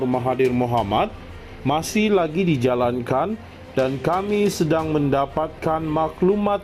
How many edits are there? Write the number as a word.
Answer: zero